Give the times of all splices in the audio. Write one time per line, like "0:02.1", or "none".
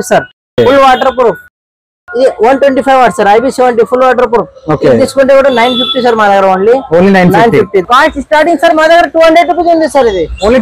0:01.9
0:07.8

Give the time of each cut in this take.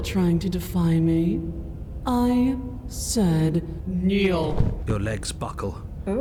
none

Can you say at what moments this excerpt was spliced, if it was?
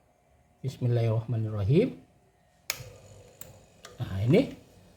none

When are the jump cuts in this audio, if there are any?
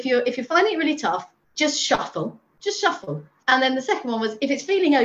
0:01.4
0:02.8

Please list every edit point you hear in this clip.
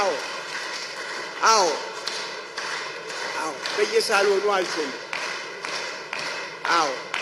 none

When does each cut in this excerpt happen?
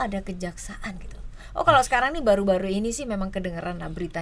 none

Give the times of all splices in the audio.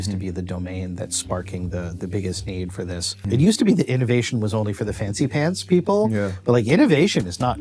0:03.1

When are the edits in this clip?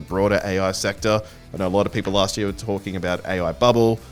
none

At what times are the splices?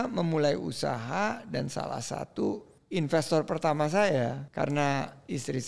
0:02.7
0:04.4

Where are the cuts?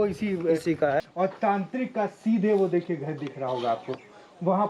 0:01.0

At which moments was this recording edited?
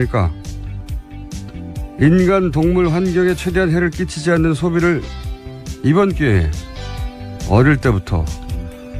0:03.1

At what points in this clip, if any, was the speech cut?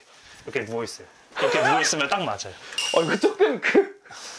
none

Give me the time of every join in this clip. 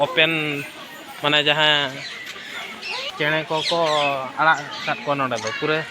0:03.1

